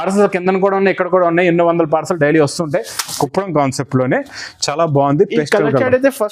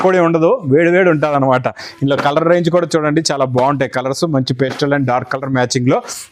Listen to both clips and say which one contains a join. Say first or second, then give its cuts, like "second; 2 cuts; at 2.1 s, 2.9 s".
first; 1 cut; at 3.1 s